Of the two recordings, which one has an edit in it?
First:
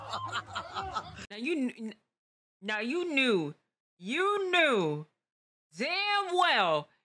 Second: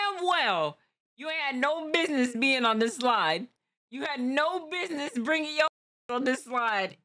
first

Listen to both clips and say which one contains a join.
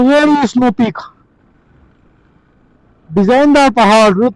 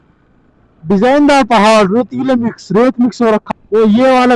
second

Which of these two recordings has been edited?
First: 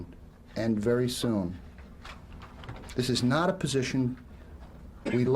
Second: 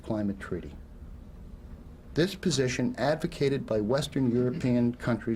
first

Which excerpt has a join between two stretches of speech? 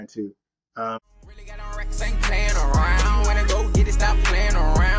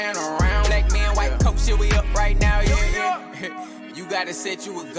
first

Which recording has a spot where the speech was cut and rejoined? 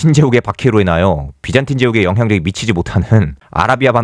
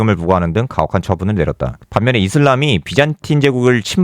second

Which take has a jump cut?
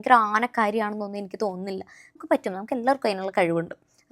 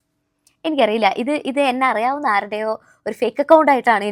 first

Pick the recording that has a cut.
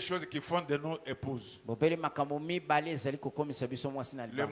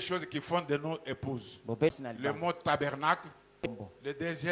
second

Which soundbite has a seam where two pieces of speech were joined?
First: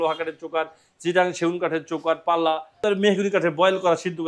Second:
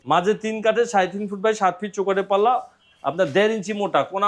first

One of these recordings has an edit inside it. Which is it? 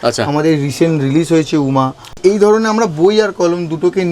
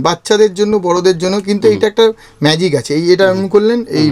first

